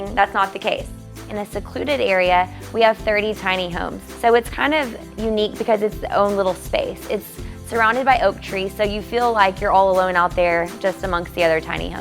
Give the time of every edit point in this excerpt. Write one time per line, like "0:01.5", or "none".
0:01.3
0:04.0